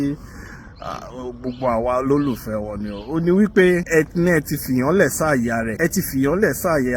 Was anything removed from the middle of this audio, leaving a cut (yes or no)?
yes